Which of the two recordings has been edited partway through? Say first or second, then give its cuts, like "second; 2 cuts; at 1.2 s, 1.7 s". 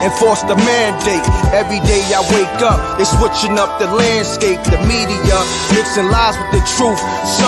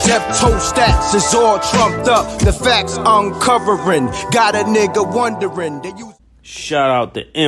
second; 1 cut; at 5.9 s